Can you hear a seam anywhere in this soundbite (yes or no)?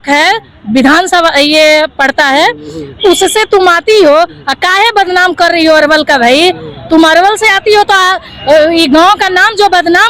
no